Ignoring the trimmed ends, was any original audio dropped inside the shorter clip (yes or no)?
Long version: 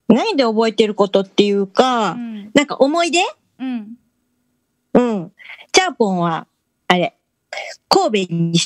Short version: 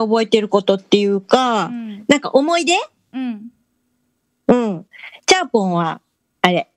no